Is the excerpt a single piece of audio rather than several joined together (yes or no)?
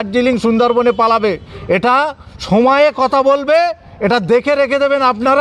yes